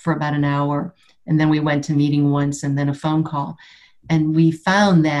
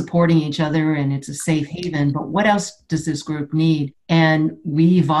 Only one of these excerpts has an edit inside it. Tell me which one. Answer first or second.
second